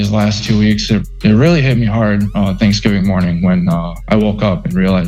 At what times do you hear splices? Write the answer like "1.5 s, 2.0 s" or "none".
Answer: none